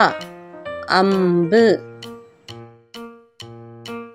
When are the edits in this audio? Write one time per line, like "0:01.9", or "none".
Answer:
0:01.8